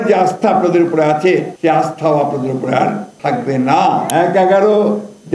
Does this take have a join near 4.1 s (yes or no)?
yes